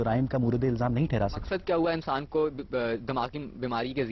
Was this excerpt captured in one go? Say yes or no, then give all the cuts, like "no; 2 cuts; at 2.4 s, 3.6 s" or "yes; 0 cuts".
no; 1 cut; at 1.5 s